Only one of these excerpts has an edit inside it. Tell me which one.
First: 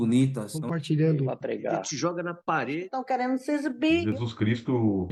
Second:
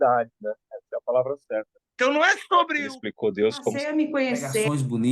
second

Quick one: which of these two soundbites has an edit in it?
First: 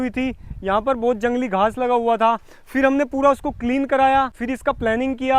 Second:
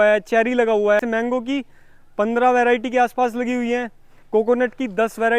second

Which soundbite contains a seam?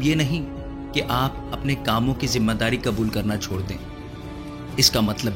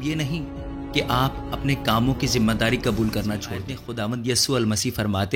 second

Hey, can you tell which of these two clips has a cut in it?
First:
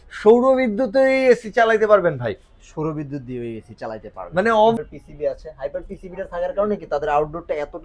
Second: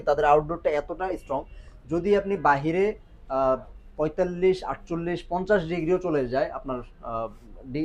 first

